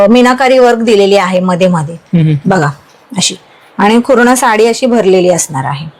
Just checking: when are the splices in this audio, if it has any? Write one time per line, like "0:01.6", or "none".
none